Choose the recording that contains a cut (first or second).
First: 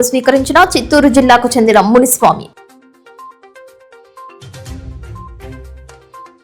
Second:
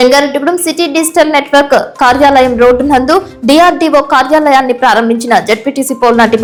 first